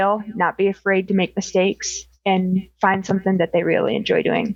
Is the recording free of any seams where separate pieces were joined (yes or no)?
yes